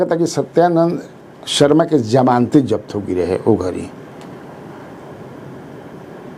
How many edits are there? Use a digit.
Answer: 0